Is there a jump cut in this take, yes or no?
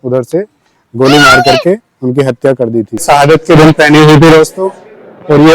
yes